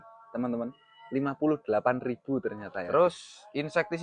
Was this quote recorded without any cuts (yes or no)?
no